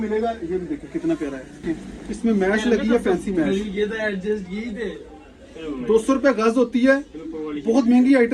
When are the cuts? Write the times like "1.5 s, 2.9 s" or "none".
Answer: 1.6 s